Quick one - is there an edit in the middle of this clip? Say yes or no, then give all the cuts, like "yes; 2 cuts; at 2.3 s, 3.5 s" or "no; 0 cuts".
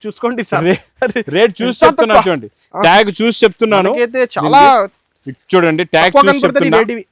no; 0 cuts